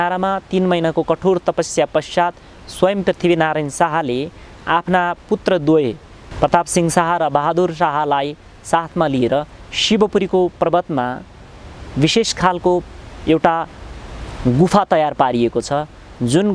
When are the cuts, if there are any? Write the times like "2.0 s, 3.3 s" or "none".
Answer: none

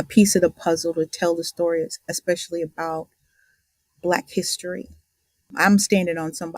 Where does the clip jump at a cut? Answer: 5.5 s

